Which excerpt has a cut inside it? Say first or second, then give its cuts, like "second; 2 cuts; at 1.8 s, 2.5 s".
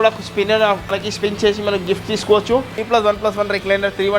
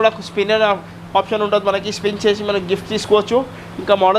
first; 2 cuts; at 1.0 s, 2.8 s